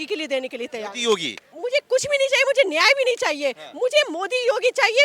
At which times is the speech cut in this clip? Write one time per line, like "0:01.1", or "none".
0:01.4